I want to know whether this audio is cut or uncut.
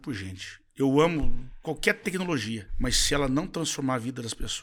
uncut